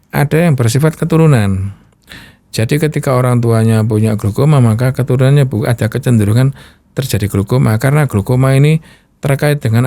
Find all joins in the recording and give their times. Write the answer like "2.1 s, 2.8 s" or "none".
none